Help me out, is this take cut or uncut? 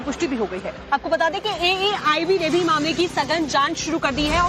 uncut